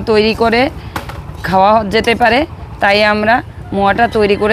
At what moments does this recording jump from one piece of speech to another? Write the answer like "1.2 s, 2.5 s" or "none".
none